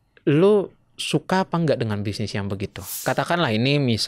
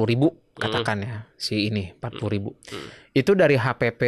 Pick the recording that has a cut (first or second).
first